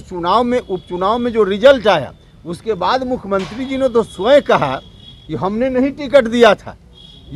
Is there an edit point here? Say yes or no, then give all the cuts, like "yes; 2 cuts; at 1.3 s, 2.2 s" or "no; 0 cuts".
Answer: no; 0 cuts